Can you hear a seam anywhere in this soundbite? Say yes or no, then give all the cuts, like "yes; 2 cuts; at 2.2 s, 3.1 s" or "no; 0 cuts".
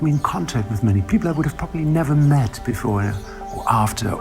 yes; 1 cut; at 1.0 s